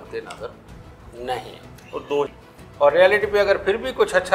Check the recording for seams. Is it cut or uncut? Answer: cut